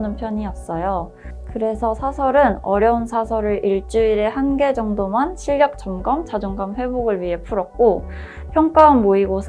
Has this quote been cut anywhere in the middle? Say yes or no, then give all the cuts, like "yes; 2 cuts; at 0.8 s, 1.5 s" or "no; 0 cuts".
yes; 1 cut; at 1.2 s